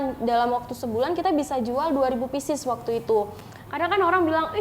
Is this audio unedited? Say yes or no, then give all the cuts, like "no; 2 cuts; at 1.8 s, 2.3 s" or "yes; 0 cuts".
no; 1 cut; at 3.5 s